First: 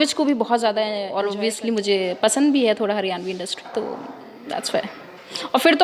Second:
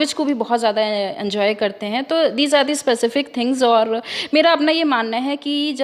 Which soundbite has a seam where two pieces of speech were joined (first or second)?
first